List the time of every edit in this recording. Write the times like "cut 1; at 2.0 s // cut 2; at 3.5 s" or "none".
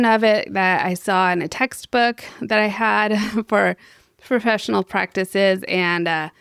none